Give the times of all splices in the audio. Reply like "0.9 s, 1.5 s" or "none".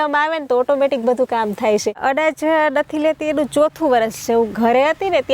2.0 s